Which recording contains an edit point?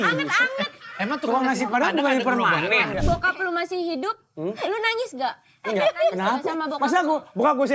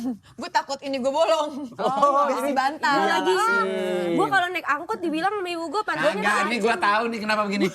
first; 1 cut; at 2.9 s

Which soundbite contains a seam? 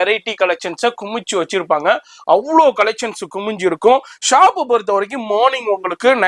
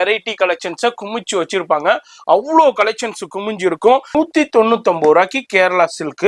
second; 1 cut; at 4.1 s

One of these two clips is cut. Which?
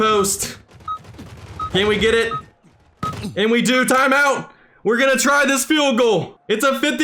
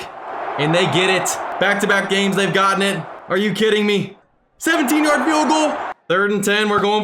second; 4 cuts; at 1.4 s, 3.1 s, 4.2 s, 5.9 s

